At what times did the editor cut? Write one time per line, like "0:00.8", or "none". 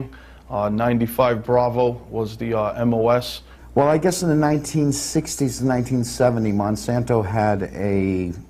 0:06.9